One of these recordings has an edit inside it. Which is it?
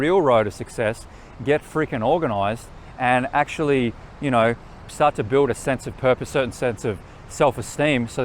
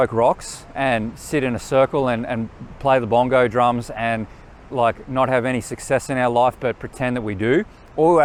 first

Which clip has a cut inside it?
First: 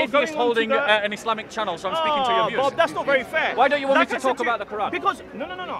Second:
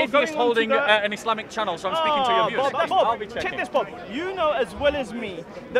second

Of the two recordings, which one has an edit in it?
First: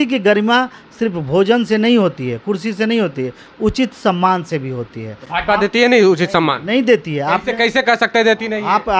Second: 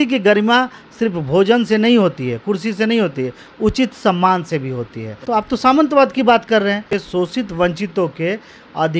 second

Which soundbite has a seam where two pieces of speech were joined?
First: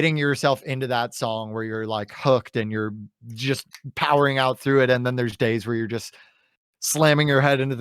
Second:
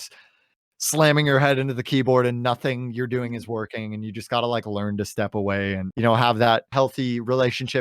second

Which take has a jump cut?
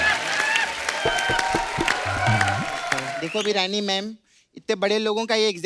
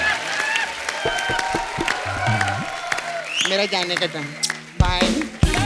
first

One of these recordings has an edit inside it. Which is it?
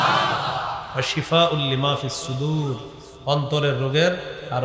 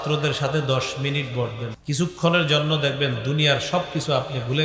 second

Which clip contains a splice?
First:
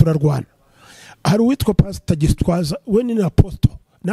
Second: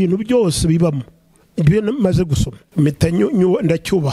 second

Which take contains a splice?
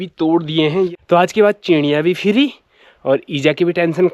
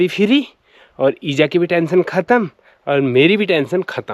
first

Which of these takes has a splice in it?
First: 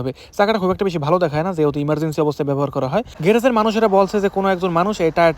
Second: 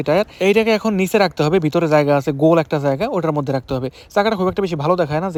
first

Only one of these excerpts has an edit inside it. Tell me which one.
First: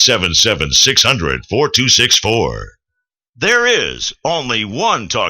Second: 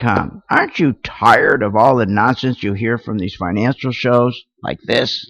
first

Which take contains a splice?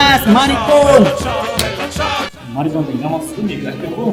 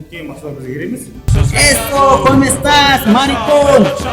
second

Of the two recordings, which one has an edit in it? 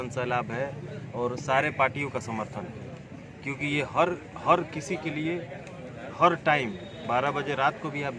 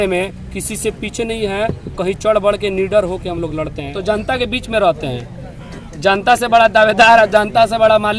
second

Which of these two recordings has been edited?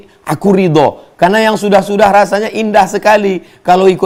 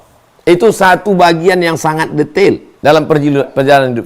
second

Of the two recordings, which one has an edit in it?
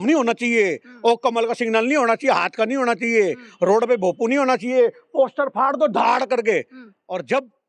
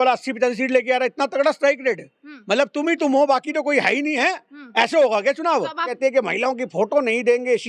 second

